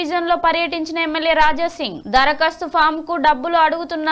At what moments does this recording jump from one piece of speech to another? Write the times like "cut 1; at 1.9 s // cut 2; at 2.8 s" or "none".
none